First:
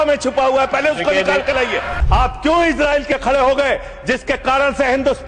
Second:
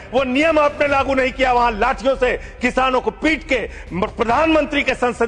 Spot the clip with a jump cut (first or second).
first